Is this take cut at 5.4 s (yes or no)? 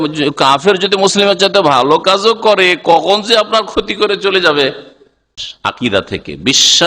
yes